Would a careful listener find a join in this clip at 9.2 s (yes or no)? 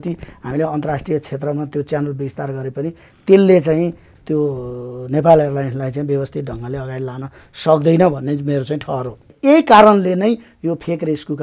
yes